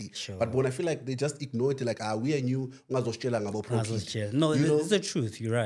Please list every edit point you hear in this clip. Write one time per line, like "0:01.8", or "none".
none